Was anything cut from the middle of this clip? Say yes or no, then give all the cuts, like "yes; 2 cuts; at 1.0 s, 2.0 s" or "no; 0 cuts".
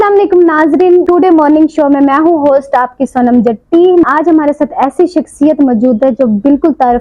yes; 2 cuts; at 1.1 s, 4.0 s